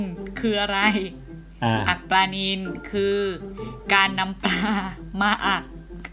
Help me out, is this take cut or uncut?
uncut